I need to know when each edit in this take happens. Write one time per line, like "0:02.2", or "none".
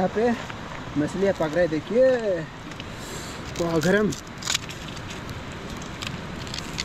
none